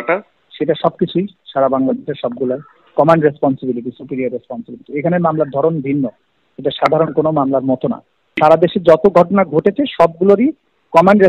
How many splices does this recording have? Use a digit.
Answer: 0